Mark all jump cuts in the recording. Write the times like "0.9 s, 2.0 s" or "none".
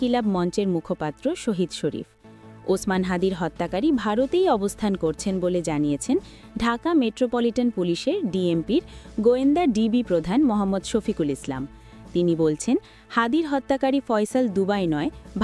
none